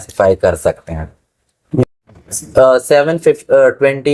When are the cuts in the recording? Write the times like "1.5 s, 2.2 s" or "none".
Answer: 1.8 s

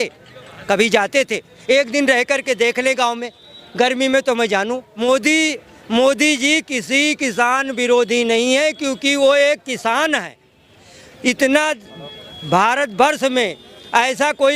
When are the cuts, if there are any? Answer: 4.9 s

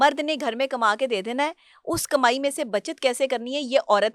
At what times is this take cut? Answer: none

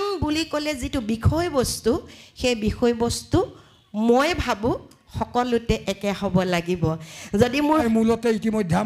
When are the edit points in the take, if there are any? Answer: 7.8 s

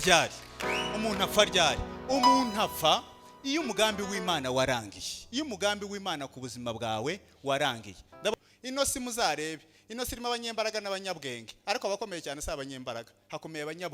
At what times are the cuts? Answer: 8.3 s

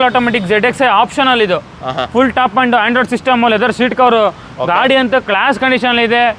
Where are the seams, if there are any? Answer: none

